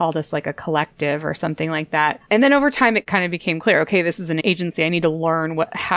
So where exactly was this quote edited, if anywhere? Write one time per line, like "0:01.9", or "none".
0:02.2
0:03.0
0:04.4